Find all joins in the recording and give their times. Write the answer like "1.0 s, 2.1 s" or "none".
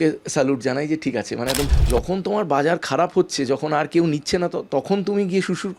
1.7 s